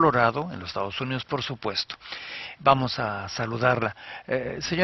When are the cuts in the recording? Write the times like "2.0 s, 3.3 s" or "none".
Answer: none